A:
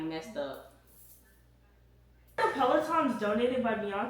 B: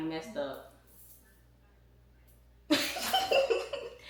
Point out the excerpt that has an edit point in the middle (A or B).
A